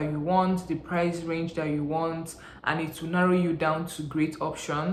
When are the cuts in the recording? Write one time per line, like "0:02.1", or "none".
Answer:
none